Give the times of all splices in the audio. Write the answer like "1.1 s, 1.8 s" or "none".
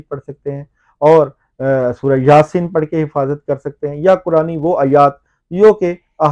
none